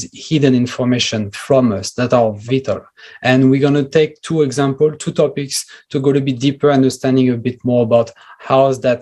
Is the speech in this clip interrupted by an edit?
yes; 1 cut; at 2.4 s

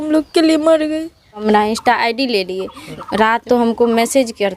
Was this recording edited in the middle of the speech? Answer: yes; 2 cuts; at 1.4 s, 3.2 s

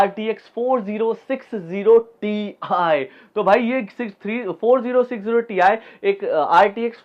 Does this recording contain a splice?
no; 0 cuts

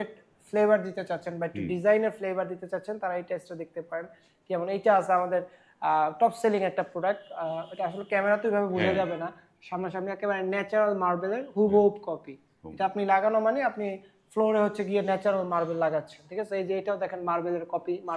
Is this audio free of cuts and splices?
yes; 0 cuts

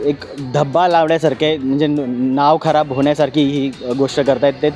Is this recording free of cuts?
yes; 0 cuts

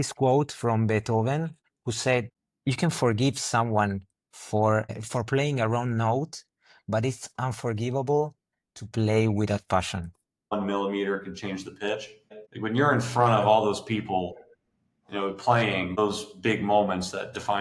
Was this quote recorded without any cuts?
no; 4 cuts; at 2.4 s, 5.0 s, 10.5 s, 16.0 s

